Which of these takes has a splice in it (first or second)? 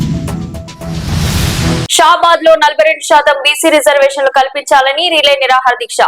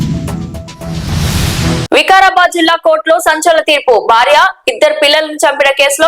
second